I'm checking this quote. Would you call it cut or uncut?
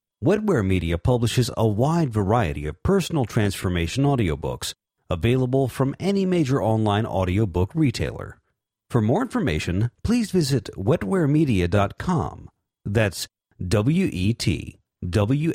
uncut